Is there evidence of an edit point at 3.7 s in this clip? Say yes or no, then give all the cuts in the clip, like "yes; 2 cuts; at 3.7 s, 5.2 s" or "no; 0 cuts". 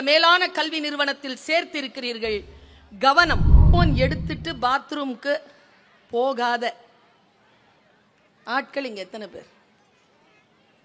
yes; 1 cut; at 3.7 s